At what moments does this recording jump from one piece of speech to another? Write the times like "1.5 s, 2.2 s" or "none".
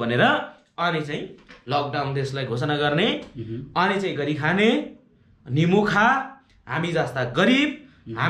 none